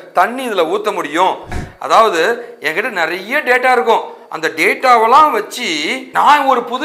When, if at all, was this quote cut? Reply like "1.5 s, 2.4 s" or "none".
1.6 s